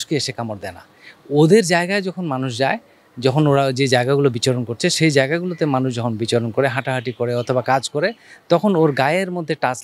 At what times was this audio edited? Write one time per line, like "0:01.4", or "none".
none